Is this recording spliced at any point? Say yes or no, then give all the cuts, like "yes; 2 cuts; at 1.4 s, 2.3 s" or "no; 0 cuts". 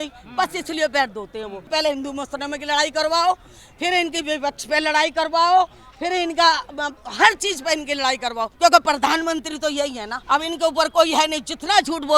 yes; 3 cuts; at 1.6 s, 8.5 s, 10.1 s